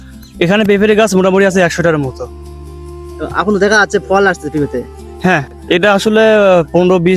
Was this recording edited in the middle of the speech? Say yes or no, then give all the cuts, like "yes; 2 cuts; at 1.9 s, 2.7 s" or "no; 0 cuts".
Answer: no; 0 cuts